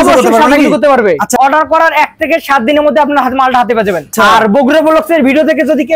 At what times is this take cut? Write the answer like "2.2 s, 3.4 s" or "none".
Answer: 1.3 s, 4.1 s